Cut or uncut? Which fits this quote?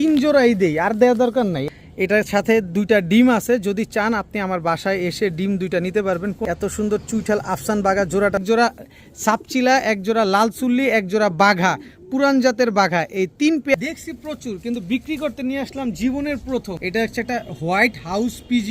cut